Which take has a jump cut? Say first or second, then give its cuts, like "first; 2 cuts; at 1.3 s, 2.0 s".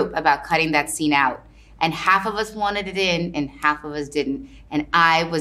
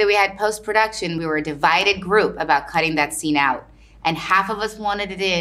second; 1 cut; at 1.2 s